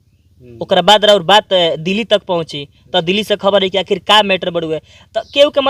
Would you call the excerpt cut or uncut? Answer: uncut